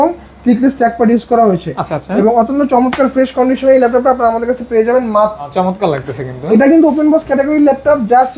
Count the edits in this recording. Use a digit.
1